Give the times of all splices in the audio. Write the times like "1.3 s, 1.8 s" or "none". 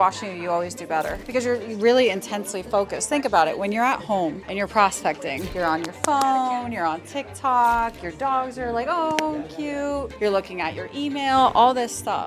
1.2 s, 4.4 s, 5.4 s, 10.1 s